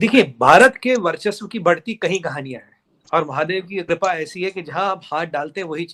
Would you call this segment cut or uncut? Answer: uncut